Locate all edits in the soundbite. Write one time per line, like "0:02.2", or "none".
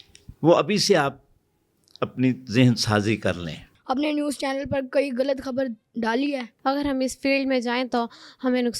0:03.7
0:06.5